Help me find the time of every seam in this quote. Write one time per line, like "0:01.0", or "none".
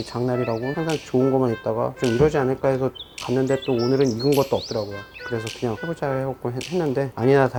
none